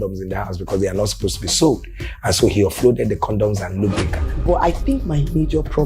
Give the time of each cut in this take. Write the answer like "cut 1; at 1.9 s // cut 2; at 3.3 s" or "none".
cut 1; at 4.3 s

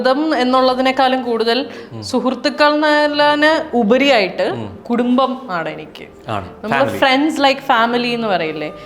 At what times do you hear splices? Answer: none

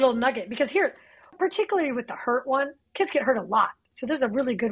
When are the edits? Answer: cut 1; at 1.3 s

